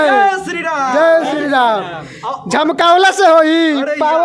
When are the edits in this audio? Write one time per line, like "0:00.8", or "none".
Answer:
none